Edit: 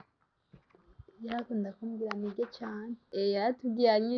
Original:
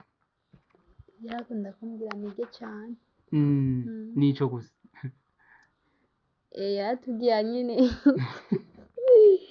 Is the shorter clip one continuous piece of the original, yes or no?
no